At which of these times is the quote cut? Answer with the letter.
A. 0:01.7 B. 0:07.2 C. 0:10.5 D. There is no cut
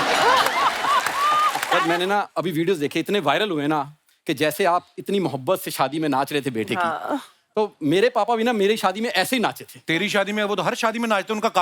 A